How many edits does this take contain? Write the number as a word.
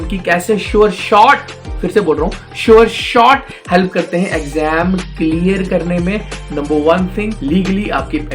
one